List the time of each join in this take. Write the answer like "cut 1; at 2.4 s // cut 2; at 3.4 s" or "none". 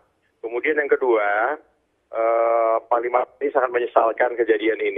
cut 1; at 3.3 s